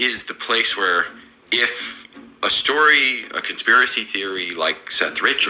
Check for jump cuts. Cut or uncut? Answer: uncut